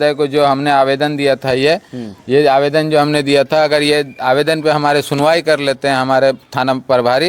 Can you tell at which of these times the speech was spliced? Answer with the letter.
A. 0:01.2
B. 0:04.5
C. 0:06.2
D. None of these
D